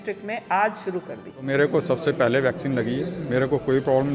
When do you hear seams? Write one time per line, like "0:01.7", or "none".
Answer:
0:01.5